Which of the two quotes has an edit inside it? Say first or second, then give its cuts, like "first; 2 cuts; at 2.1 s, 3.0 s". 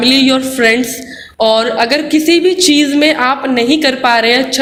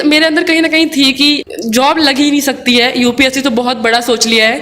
second; 1 cut; at 1.4 s